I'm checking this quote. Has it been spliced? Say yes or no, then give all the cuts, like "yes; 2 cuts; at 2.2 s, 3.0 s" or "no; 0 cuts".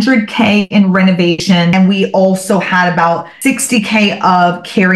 yes; 2 cuts; at 1.6 s, 3.3 s